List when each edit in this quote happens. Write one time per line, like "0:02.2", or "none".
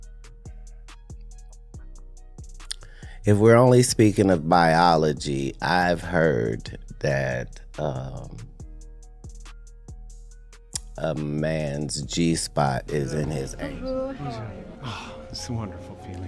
0:13.5